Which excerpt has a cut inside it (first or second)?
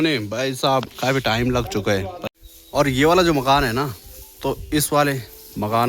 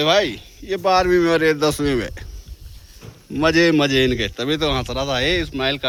first